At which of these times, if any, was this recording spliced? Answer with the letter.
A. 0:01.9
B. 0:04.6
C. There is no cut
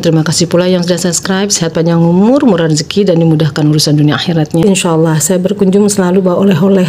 B